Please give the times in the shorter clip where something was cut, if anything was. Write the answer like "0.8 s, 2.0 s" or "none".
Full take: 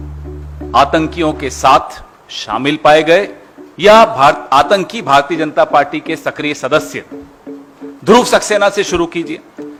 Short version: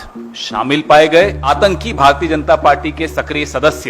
1.4 s